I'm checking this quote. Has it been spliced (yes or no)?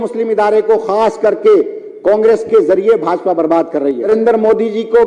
yes